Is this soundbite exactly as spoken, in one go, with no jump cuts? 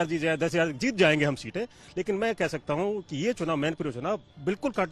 yes; 0 cuts

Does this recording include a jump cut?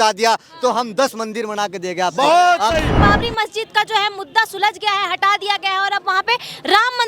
yes; 1 cut; at 2.9 s

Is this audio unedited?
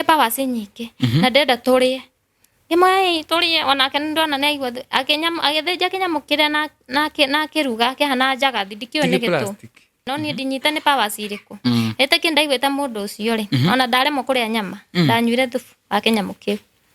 no; 1 cut; at 10.0 s

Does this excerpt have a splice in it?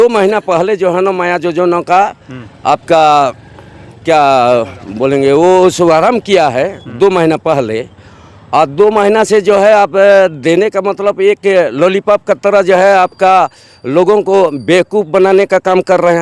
no; 0 cuts

